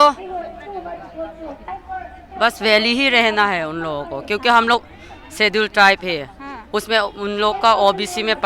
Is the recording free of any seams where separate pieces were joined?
no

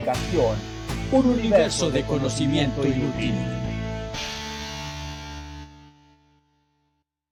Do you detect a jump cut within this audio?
no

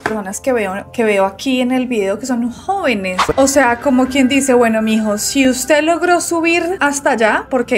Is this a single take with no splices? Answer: no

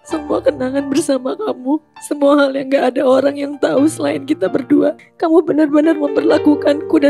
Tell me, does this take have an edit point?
yes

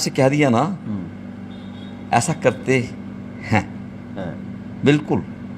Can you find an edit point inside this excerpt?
no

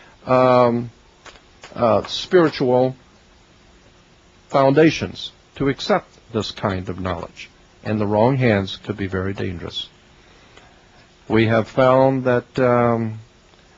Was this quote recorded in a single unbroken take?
no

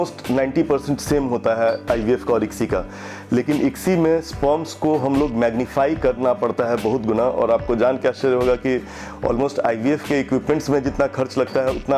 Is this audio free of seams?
yes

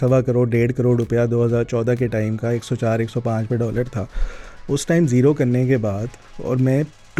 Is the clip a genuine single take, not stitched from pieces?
yes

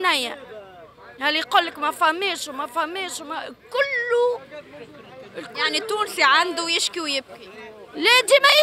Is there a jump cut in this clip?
no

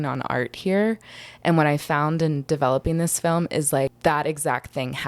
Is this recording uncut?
no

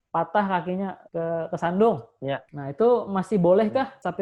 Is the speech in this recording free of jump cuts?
yes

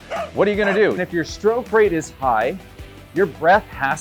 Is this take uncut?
no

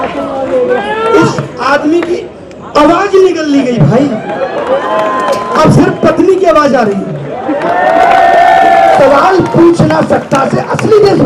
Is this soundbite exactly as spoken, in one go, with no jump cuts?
no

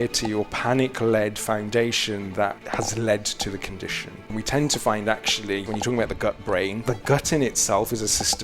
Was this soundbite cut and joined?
yes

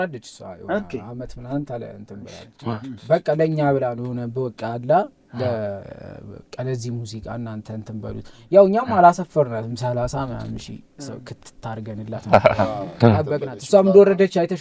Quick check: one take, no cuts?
yes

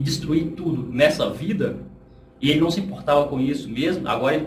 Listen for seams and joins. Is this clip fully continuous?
yes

